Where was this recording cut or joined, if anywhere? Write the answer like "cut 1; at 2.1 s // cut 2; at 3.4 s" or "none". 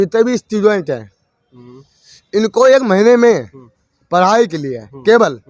none